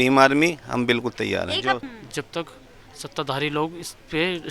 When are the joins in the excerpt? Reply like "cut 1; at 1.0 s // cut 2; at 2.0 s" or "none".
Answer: cut 1; at 1.8 s